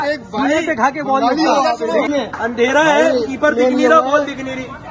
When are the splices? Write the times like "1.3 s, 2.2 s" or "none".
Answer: 2.1 s